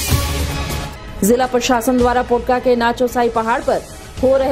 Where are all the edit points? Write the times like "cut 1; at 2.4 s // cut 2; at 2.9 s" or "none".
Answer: cut 1; at 0.9 s